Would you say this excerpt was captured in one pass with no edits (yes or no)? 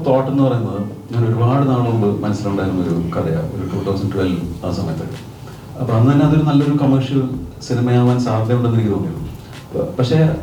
yes